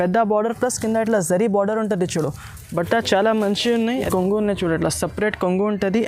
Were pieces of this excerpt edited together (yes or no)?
yes